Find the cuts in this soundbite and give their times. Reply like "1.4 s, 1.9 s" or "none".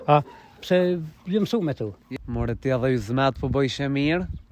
2.0 s